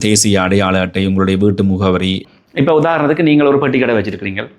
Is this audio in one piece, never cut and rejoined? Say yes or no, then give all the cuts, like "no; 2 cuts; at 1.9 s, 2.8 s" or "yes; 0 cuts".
no; 1 cut; at 2.2 s